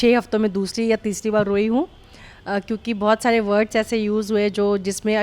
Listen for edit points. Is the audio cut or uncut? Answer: uncut